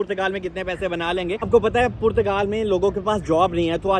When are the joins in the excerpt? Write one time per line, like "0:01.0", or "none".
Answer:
0:01.5